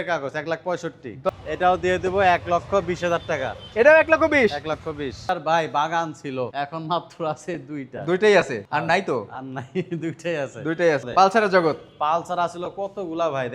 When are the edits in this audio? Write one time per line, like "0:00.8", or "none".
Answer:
0:01.3
0:05.2
0:11.1